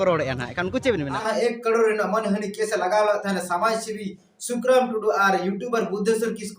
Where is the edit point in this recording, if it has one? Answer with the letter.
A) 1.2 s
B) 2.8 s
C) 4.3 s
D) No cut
A